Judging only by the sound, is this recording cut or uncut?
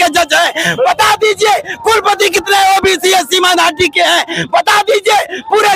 uncut